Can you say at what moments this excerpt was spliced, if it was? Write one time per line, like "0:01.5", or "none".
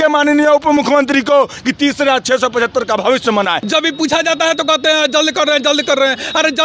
0:03.6